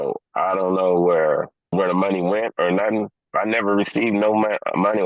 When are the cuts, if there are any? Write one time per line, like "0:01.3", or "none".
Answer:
0:01.7
0:03.2